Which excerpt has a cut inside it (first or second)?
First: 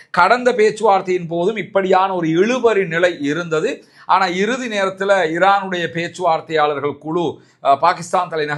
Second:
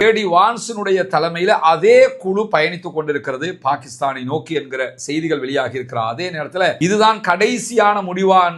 second